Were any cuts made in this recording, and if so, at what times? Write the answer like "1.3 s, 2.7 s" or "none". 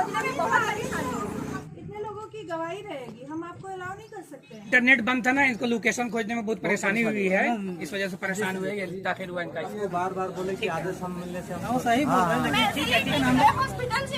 1.6 s, 4.7 s, 9.7 s, 13.2 s